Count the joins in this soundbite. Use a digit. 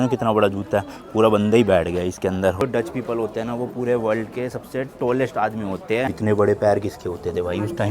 2